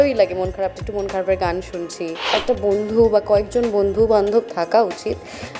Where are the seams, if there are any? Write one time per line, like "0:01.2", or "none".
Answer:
0:02.3

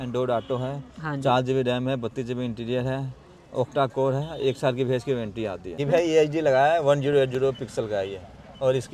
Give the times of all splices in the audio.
0:05.7

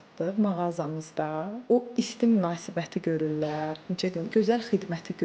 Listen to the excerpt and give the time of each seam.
none

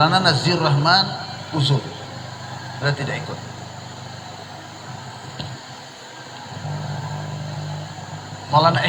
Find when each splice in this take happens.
none

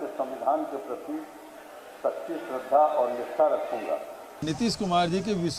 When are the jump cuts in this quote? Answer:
0:04.4

